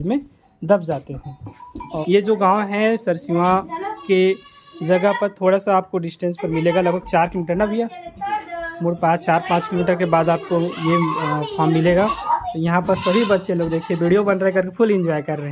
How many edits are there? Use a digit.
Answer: 2